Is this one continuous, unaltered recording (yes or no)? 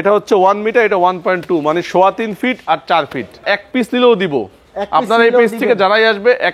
no